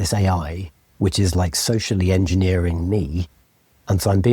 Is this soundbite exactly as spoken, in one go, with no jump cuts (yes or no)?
yes